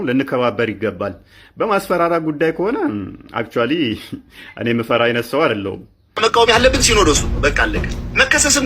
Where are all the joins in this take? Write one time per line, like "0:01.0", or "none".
0:06.1